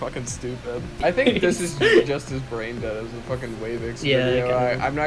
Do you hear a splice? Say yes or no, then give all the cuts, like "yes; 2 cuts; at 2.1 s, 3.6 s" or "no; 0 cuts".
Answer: yes; 1 cut; at 1.0 s